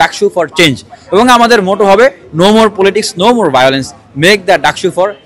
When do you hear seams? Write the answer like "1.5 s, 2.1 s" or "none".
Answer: none